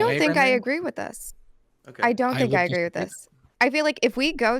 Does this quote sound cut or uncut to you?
uncut